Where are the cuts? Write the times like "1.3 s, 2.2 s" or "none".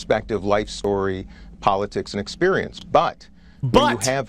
none